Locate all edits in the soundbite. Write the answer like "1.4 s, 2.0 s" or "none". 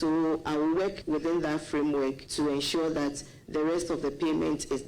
1.0 s, 2.2 s